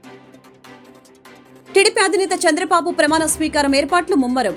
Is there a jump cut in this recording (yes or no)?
yes